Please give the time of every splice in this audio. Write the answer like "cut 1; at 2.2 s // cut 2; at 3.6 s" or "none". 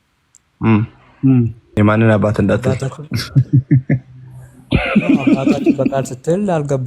cut 1; at 1.6 s